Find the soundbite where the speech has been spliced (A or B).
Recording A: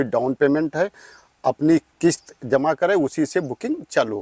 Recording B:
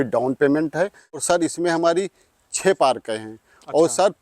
B